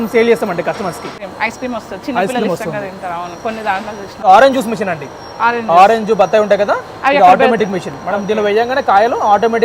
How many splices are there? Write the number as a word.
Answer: two